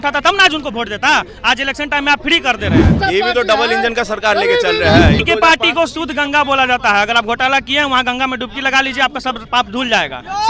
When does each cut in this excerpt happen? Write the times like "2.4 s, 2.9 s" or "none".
2.9 s, 5.2 s